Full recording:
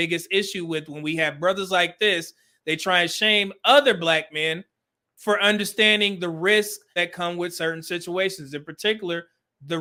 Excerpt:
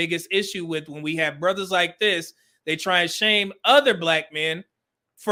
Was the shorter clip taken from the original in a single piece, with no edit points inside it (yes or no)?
yes